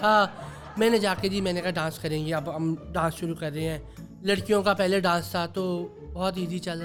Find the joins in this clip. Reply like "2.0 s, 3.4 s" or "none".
none